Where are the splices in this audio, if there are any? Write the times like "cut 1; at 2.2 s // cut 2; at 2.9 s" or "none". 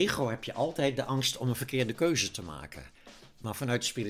none